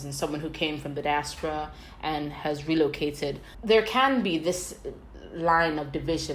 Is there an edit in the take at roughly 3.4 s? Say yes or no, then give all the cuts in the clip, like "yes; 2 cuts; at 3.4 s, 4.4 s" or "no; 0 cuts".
yes; 1 cut; at 3.4 s